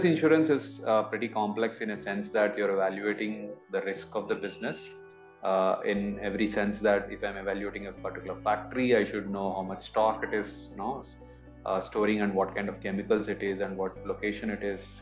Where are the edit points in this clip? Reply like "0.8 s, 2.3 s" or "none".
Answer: none